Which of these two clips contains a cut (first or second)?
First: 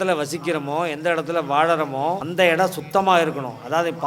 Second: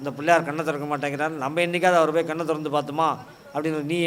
first